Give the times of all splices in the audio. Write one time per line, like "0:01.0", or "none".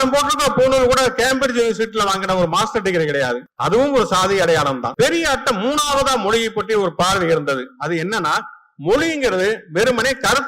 0:03.5
0:04.9